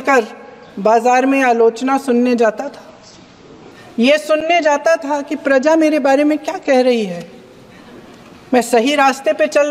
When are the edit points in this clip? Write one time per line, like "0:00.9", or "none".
none